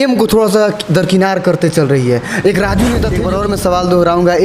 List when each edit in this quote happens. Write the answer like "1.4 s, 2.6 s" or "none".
3.2 s